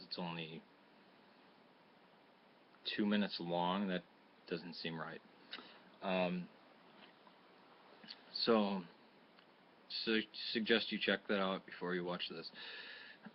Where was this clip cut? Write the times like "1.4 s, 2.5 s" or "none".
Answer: 5.4 s